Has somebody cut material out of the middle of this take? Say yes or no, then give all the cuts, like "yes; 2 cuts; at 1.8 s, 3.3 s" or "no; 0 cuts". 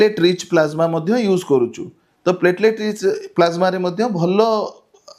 no; 0 cuts